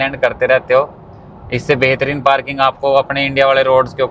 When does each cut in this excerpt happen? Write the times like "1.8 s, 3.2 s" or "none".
none